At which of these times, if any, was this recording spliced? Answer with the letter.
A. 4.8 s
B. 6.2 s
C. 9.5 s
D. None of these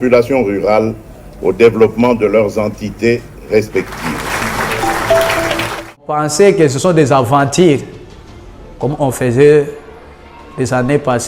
B